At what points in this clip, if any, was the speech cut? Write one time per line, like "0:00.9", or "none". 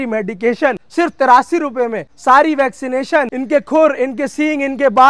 0:00.8
0:02.1
0:03.4